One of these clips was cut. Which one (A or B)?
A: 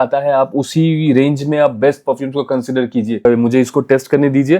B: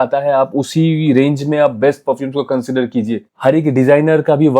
A